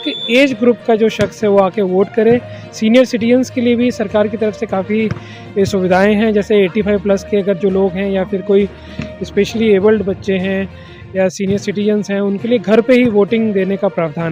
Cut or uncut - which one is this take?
uncut